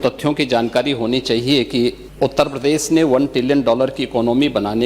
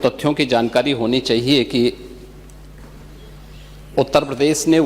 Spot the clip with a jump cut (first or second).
first